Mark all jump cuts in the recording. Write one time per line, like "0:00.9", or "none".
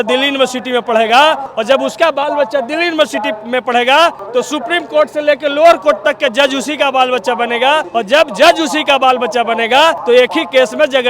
0:01.5
0:04.2
0:07.9
0:10.0